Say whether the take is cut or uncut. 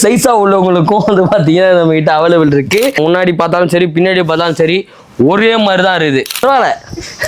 cut